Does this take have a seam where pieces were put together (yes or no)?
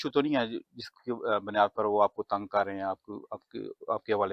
no